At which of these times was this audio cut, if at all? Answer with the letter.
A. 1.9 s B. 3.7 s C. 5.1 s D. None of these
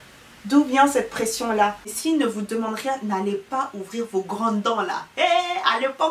A